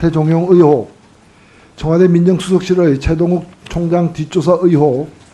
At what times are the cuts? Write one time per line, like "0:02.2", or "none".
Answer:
0:02.2